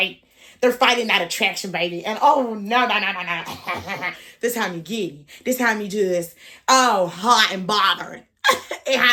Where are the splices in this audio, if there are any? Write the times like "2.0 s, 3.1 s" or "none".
none